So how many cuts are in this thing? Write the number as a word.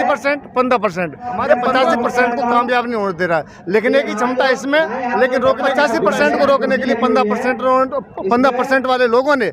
two